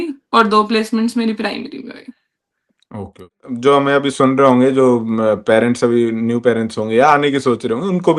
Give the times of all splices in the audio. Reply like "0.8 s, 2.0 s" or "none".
3.4 s